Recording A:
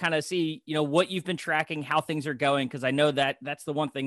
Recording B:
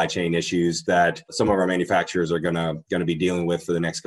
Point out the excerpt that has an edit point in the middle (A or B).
B